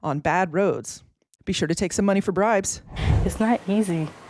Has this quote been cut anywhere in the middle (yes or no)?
yes